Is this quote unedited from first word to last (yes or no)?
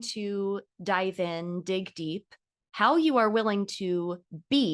yes